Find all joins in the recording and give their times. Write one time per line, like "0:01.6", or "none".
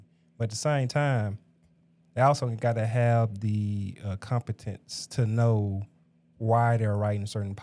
none